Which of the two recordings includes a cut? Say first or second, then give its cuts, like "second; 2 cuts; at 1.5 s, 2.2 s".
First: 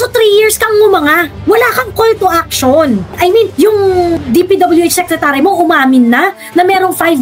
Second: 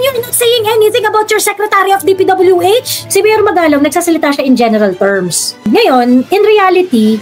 second; 2 cuts; at 3.0 s, 5.5 s